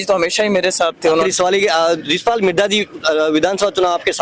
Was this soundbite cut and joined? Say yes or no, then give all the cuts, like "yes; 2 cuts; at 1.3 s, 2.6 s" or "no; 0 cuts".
yes; 1 cut; at 1.1 s